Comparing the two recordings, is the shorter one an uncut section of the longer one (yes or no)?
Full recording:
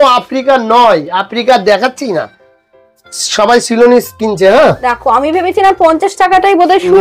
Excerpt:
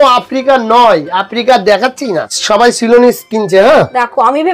no